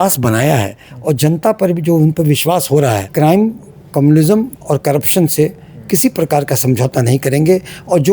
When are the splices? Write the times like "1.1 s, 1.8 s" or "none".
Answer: 3.1 s